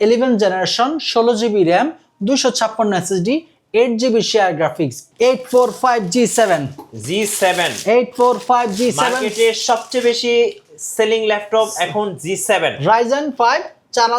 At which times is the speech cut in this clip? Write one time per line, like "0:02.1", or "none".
0:05.0